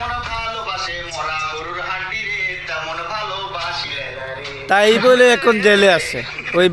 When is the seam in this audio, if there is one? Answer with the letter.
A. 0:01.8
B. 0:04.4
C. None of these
C